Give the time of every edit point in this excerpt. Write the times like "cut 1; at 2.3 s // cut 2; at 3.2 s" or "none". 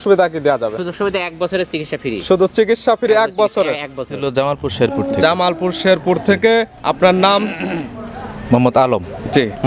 cut 1; at 4.2 s